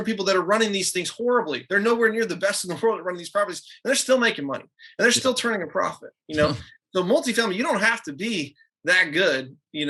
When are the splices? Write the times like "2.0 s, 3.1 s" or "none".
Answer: none

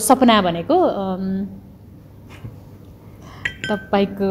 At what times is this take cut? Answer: none

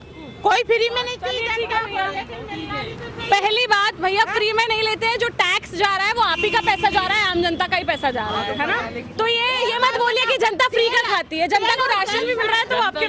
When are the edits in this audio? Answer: none

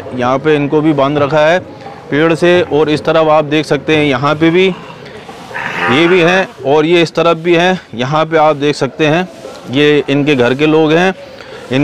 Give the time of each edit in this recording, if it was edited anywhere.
none

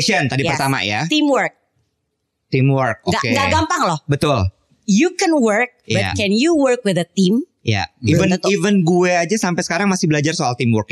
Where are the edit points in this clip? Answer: none

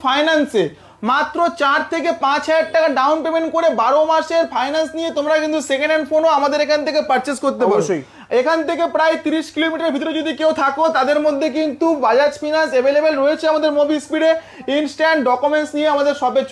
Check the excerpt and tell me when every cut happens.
none

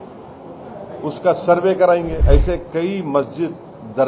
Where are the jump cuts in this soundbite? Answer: 2.2 s

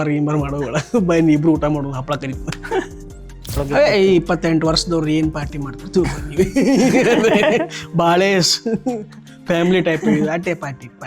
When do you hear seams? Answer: 3.6 s

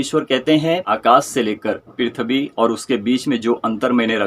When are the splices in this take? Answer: 0.9 s

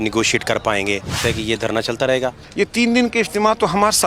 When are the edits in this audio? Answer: 1.2 s, 2.4 s

